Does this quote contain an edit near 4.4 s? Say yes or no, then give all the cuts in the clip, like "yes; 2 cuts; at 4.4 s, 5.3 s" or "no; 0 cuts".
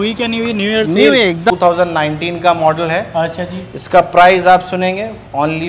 no; 1 cut; at 1.5 s